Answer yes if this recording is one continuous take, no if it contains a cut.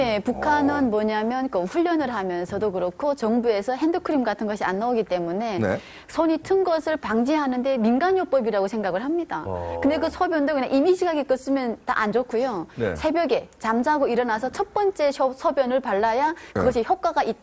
yes